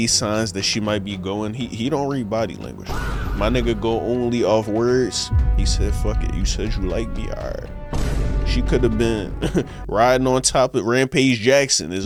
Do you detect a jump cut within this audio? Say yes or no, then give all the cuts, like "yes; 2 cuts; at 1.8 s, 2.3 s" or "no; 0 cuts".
no; 0 cuts